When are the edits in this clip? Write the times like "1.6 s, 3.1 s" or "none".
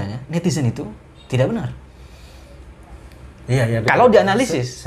none